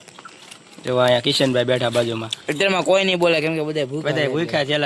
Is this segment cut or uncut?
uncut